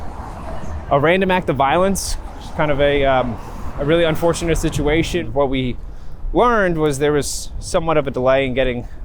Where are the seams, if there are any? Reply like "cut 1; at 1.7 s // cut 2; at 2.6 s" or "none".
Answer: cut 1; at 5.2 s